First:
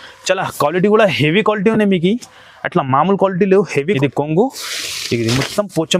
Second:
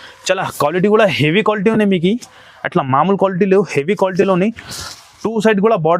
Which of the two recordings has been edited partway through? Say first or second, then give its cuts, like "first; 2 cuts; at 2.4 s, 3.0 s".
first; 1 cut; at 4.0 s